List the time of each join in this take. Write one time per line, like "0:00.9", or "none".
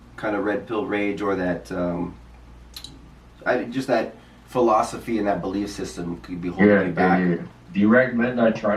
0:07.5